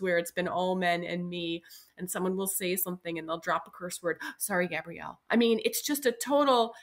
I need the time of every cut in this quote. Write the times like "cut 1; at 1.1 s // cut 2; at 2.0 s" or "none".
none

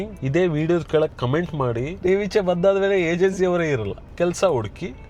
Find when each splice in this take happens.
cut 1; at 1.9 s // cut 2; at 4.0 s

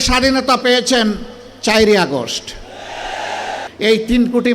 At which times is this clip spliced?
cut 1; at 3.6 s

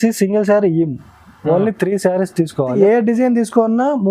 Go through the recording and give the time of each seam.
cut 1; at 2.8 s

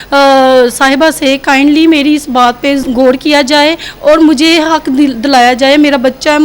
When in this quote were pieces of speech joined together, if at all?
cut 1; at 2.9 s

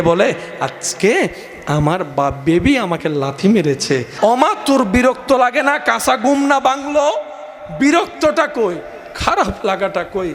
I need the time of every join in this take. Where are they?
cut 1; at 4.1 s

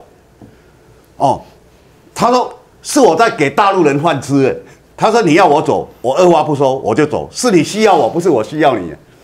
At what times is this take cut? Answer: cut 1; at 4.8 s

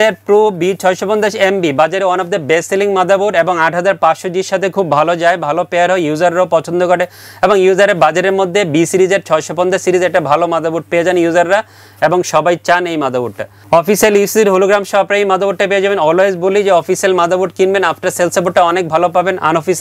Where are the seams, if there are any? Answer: none

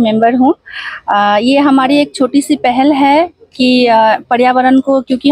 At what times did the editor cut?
none

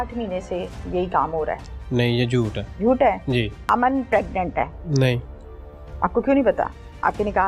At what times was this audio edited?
cut 1; at 2.6 s // cut 2; at 3.6 s // cut 3; at 4.8 s

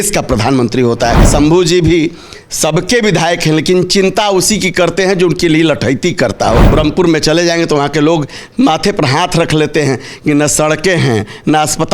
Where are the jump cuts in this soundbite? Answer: cut 1; at 1.3 s // cut 2; at 6.7 s

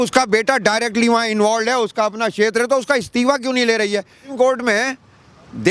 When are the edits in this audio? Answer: cut 1; at 4.3 s

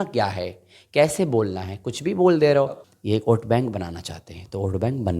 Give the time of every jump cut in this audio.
cut 1; at 2.9 s

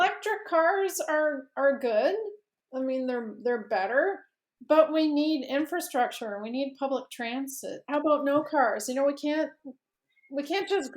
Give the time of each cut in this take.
cut 1; at 7.9 s

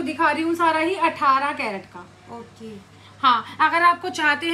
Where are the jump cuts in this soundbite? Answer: none

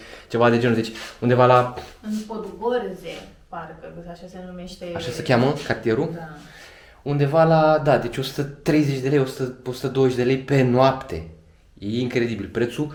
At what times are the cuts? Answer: none

